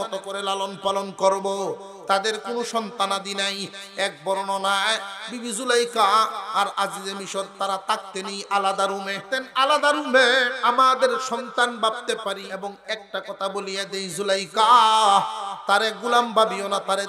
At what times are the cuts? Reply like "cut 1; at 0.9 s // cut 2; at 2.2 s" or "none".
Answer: cut 1; at 9.2 s // cut 2; at 10.5 s // cut 3; at 12.5 s